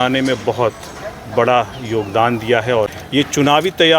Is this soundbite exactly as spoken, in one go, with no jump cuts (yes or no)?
no